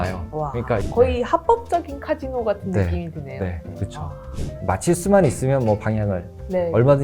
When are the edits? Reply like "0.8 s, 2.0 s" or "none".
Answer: 0.8 s, 4.2 s